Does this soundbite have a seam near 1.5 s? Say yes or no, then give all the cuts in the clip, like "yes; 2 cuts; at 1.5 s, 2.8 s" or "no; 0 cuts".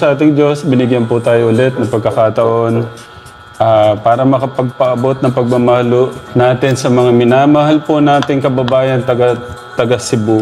no; 1 cut; at 6.2 s